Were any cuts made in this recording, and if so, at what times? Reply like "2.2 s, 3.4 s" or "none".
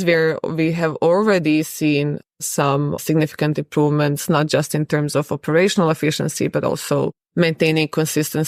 2.9 s